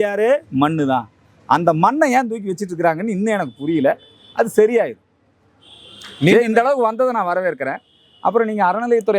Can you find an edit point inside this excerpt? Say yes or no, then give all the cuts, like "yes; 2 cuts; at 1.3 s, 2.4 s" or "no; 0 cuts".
no; 0 cuts